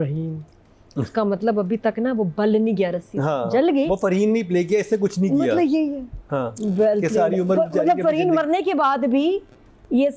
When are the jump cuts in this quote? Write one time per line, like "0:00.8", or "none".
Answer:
none